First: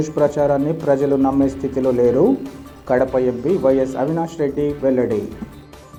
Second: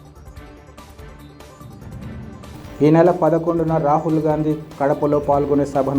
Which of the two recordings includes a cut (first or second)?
second